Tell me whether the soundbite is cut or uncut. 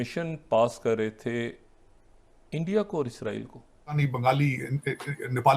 cut